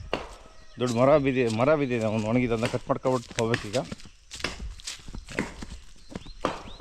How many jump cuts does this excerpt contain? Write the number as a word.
zero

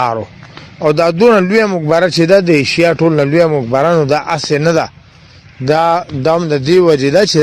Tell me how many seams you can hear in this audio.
zero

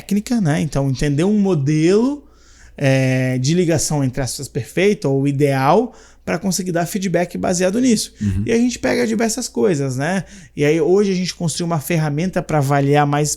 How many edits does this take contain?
zero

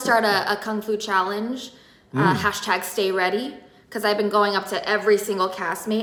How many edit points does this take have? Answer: zero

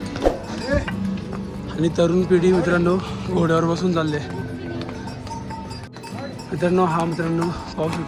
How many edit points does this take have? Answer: zero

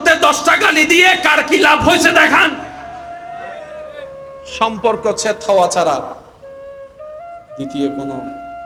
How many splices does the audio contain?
zero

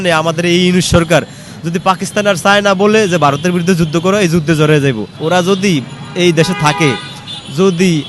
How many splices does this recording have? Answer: one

